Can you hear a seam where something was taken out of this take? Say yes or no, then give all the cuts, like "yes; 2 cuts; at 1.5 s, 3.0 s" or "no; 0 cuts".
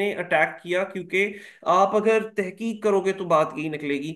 no; 0 cuts